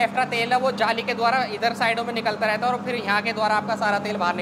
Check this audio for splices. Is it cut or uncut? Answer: uncut